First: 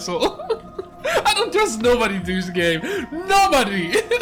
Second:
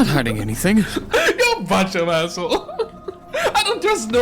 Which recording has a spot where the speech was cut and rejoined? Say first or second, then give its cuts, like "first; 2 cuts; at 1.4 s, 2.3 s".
second; 1 cut; at 1.0 s